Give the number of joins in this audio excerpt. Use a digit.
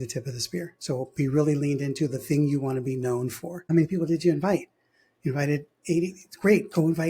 1